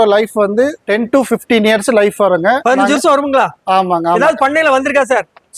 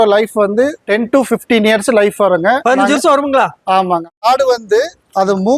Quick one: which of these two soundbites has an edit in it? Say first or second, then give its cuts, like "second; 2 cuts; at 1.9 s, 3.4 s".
second; 1 cut; at 4.2 s